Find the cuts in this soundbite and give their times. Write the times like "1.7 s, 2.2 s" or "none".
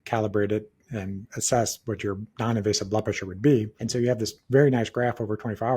2.3 s, 3.8 s